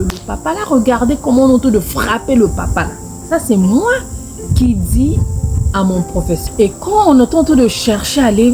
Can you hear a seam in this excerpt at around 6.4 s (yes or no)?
yes